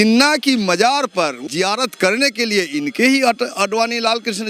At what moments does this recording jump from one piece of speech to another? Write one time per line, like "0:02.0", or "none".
0:01.4